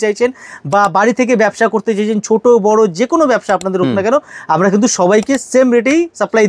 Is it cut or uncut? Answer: uncut